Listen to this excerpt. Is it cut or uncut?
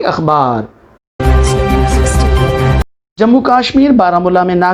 cut